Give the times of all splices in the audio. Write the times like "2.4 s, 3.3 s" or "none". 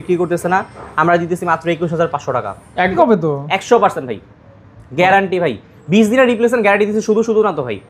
3.0 s